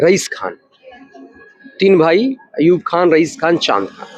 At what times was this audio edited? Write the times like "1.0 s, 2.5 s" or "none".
none